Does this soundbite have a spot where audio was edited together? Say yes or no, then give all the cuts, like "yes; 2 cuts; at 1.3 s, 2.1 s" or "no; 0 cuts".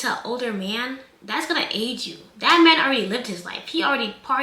no; 0 cuts